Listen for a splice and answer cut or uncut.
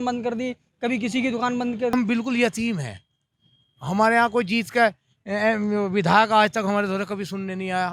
cut